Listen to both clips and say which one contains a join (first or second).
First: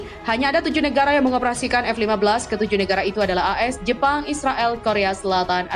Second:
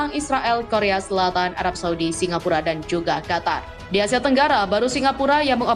second